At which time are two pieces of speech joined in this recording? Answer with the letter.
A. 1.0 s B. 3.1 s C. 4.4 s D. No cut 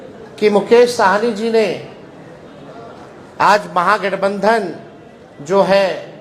D